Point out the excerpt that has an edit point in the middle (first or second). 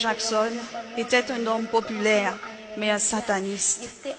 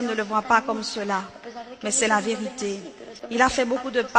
second